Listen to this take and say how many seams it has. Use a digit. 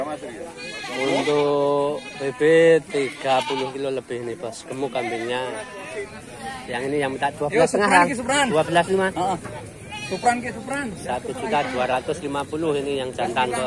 1